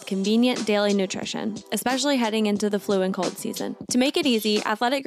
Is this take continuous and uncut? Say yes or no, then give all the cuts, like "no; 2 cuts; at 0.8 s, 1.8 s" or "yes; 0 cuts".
no; 1 cut; at 3.7 s